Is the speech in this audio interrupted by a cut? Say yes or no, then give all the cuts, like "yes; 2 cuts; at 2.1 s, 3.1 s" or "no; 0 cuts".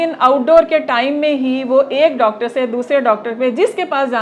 no; 0 cuts